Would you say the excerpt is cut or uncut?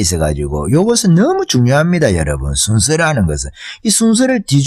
uncut